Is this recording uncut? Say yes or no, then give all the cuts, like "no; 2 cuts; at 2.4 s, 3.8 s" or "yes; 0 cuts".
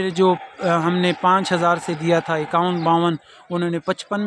yes; 0 cuts